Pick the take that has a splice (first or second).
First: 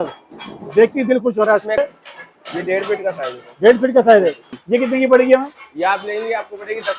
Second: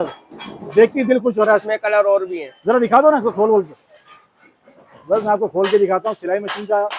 first